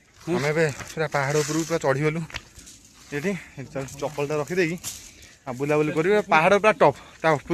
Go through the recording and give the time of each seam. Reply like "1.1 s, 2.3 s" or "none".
none